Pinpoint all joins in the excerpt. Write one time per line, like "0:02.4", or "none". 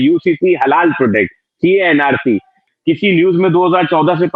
0:02.6